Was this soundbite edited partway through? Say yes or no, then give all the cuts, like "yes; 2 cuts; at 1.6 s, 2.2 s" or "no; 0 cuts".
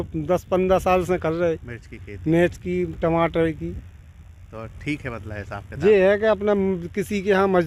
no; 0 cuts